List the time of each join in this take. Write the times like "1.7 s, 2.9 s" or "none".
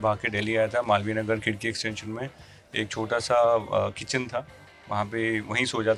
none